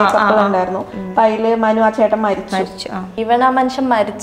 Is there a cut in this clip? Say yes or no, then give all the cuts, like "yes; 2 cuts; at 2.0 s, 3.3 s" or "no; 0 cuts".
yes; 1 cut; at 3.1 s